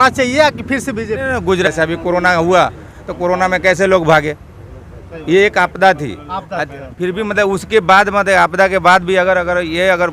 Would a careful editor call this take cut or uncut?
cut